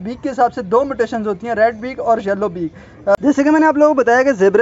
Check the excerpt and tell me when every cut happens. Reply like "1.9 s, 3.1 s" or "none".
3.1 s